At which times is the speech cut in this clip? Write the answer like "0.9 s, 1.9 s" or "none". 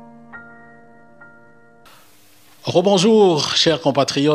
1.7 s